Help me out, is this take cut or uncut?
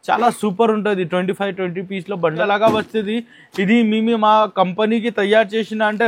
cut